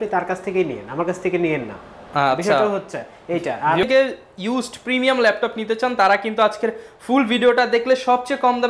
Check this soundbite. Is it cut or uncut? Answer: cut